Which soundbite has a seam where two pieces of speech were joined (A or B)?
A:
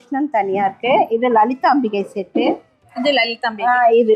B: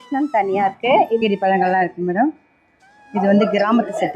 B